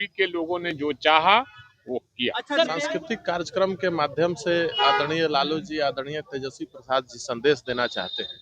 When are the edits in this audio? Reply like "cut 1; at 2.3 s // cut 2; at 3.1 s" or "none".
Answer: cut 1; at 2.7 s